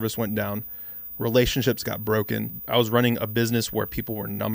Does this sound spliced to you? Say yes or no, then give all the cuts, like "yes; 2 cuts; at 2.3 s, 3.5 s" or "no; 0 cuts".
yes; 1 cut; at 2.5 s